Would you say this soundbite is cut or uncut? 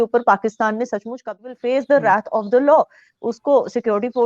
cut